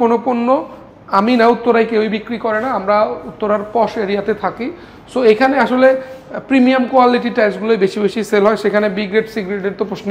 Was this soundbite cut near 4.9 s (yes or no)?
no